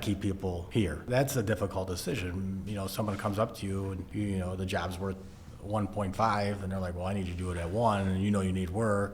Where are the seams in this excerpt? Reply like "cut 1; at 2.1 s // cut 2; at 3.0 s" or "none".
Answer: cut 1; at 1.1 s // cut 2; at 4.0 s